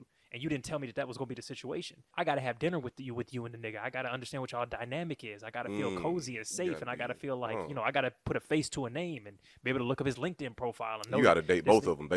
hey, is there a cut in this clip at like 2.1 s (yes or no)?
yes